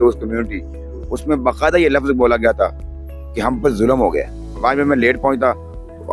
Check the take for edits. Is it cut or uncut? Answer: cut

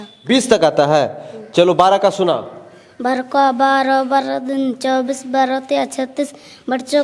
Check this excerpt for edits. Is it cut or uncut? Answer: uncut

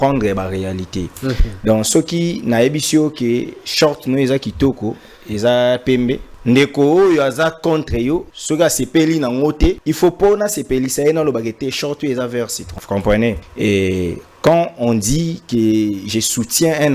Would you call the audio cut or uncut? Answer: cut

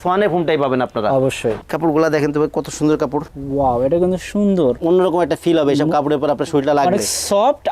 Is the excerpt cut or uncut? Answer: cut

